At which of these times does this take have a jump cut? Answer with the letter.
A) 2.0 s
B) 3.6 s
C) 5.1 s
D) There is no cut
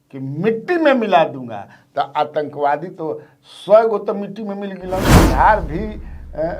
C